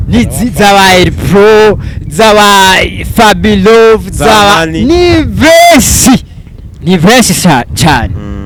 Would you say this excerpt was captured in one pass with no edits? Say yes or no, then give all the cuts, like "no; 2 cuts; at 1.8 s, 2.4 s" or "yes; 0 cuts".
yes; 0 cuts